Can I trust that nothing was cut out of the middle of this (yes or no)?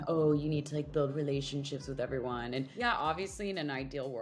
no